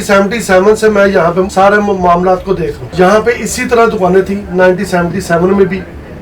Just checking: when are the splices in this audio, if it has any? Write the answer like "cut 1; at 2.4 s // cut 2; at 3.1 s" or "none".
cut 1; at 1.5 s // cut 2; at 2.8 s